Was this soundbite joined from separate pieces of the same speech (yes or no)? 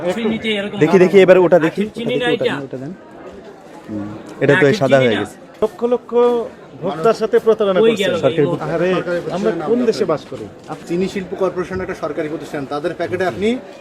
yes